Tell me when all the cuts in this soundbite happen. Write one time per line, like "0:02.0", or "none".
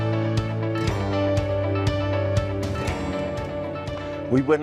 none